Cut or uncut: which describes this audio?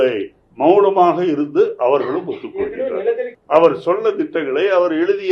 cut